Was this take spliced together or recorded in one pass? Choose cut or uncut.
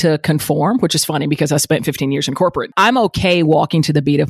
cut